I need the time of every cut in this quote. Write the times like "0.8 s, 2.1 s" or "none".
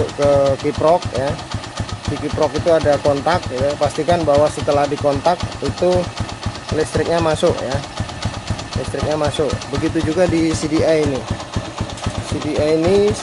none

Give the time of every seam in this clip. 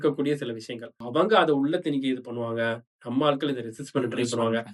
1.0 s

